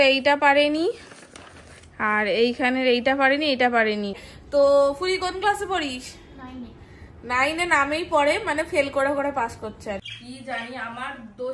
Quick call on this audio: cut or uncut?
cut